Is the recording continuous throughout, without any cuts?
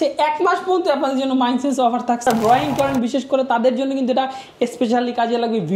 no; 1 cut; at 2.3 s

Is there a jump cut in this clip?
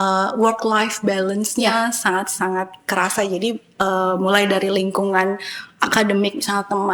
no; 0 cuts

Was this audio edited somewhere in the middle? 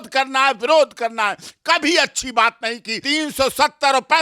yes; 1 cut; at 2.9 s

